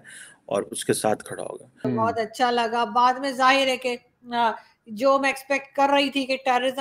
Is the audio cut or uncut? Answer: cut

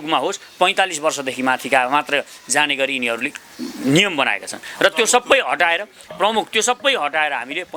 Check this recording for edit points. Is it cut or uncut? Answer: uncut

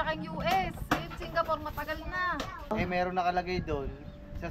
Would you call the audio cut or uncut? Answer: cut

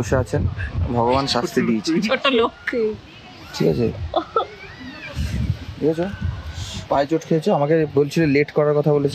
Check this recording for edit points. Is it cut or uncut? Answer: uncut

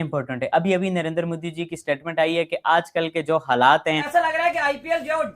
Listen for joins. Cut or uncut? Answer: cut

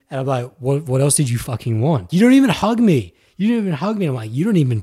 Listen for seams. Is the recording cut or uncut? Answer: cut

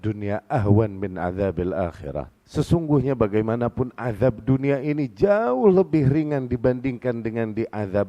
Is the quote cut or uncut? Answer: cut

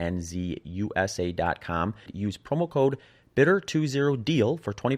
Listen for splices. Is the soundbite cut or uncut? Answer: cut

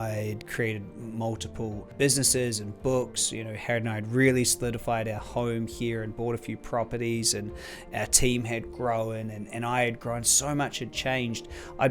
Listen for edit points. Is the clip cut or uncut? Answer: cut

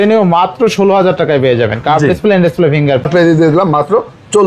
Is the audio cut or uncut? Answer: cut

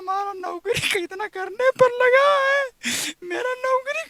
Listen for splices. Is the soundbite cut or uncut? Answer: uncut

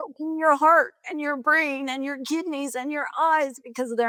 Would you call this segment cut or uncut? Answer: uncut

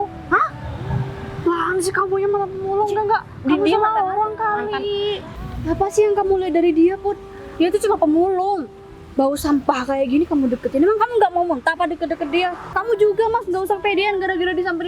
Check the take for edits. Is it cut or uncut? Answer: cut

